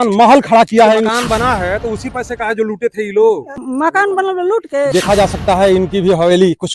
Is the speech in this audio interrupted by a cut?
yes; 2 cuts; at 1.0 s, 4.7 s

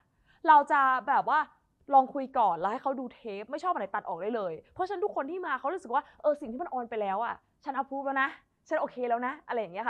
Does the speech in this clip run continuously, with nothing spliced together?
yes; 0 cuts

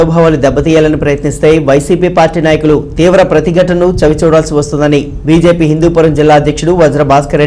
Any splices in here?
no; 0 cuts

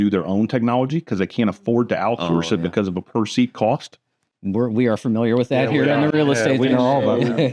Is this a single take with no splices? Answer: yes; 0 cuts

